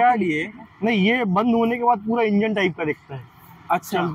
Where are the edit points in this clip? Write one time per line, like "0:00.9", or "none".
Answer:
none